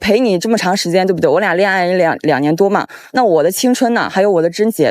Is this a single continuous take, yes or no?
no